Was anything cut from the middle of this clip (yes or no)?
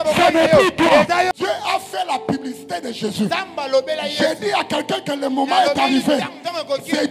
yes